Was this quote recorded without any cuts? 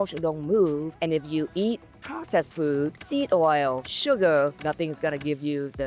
no; 4 cuts; at 0.9 s, 3.0 s, 3.9 s, 4.6 s

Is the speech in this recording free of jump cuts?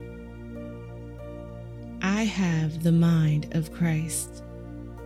no; 1 cut; at 4.1 s

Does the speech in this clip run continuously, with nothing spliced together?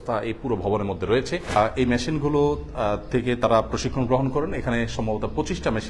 no; 1 cut; at 1.5 s

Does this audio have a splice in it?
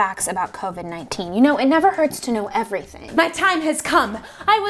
yes; 1 cut; at 3.0 s

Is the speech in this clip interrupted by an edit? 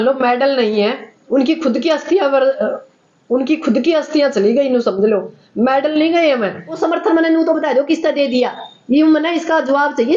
yes; 1 cut; at 6.8 s

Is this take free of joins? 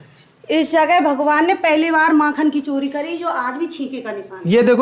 yes; 0 cuts

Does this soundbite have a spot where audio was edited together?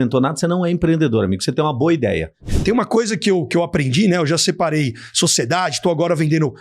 yes; 1 cut; at 2.3 s

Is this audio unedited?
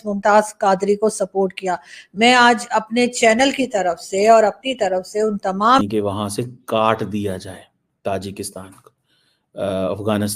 no; 1 cut; at 5.8 s

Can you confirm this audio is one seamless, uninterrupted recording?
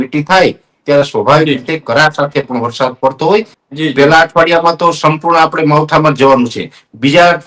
no; 1 cut; at 3.6 s

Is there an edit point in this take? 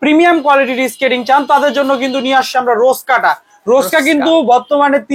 no; 0 cuts

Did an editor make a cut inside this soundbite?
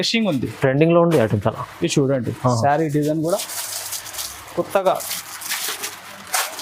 no; 0 cuts

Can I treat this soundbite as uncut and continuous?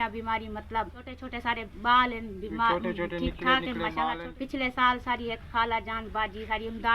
no; 2 cuts; at 1.2 s, 4.3 s

